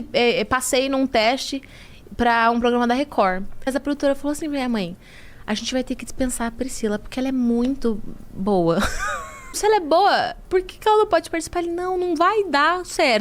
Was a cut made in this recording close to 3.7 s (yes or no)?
yes